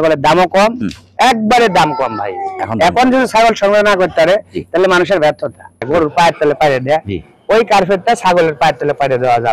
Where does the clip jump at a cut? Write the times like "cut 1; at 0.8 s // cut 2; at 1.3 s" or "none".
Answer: cut 1; at 5.9 s